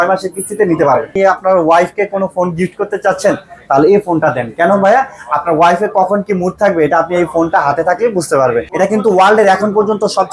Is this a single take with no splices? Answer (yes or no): no